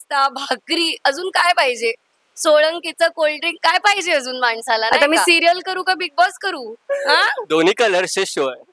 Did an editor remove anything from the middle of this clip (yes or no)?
yes